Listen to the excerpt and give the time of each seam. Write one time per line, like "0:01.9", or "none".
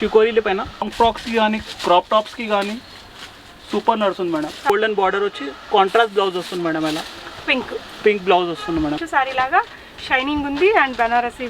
0:00.9
0:04.7
0:09.0